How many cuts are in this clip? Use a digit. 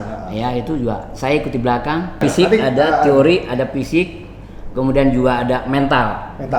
1